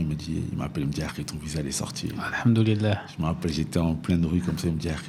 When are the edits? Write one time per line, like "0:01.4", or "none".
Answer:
none